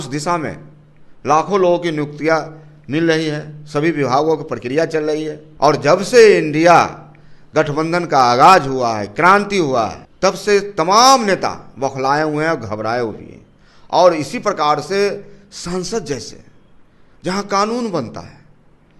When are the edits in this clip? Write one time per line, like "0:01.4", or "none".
0:05.4
0:10.0